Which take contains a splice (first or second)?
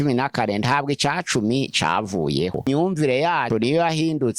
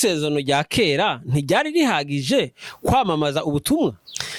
first